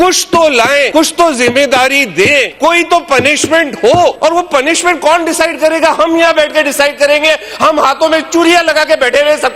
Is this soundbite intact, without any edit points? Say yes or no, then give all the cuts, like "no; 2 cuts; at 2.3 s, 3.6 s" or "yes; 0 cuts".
no; 3 cuts; at 0.9 s, 2.5 s, 4.2 s